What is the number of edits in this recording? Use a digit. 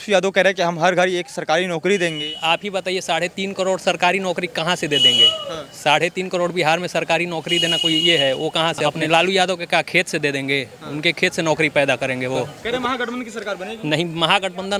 2